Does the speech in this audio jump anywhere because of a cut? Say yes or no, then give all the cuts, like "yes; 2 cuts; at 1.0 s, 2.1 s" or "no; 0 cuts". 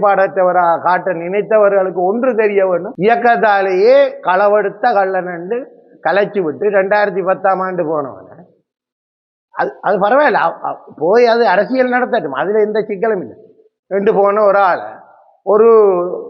yes; 1 cut; at 2.9 s